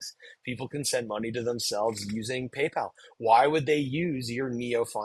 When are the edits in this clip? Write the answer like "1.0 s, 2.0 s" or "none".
none